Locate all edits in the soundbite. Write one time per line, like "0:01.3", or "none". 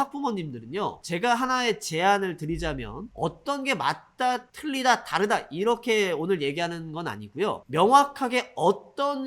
0:01.0
0:04.5